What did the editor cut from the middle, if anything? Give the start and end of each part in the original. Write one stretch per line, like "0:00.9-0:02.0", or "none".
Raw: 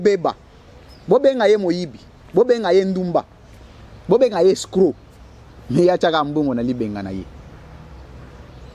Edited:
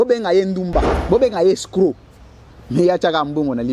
0:03.3-0:03.9